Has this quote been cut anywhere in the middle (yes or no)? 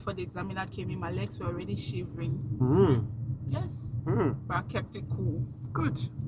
no